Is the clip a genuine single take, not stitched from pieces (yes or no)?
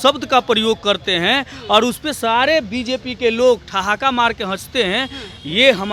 yes